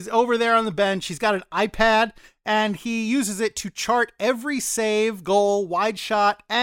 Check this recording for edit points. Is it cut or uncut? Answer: uncut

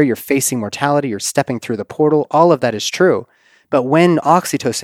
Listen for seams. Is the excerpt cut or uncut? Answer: uncut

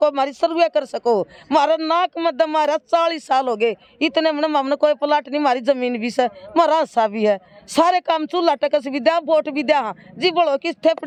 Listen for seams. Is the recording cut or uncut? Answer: uncut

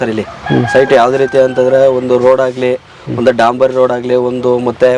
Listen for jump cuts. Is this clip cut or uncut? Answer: uncut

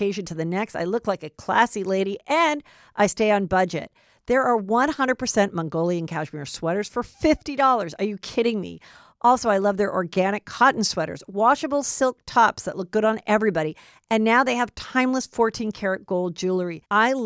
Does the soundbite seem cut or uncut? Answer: uncut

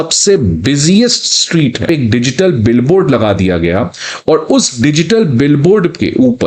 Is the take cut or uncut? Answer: cut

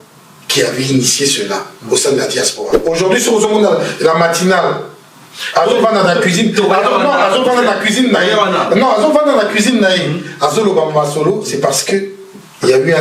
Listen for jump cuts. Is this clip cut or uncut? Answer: cut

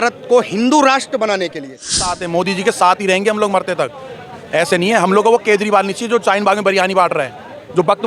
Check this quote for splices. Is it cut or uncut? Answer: cut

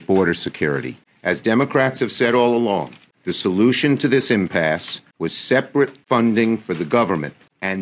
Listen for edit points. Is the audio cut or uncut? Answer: uncut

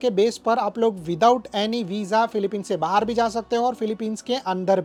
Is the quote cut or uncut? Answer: uncut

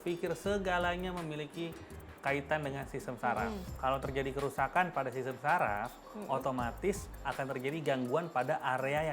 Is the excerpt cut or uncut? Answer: cut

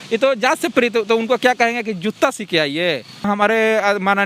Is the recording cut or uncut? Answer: cut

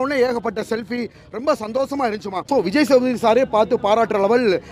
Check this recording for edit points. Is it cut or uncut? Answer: cut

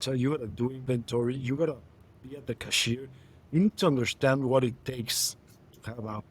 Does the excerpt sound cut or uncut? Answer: uncut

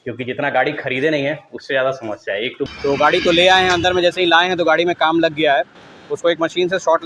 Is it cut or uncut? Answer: cut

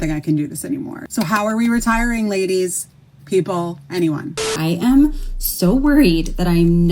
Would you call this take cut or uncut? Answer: cut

